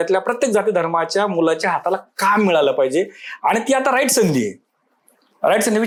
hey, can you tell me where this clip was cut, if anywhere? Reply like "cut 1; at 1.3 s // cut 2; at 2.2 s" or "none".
none